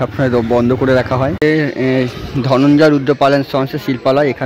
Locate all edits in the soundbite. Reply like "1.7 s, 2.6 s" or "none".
1.3 s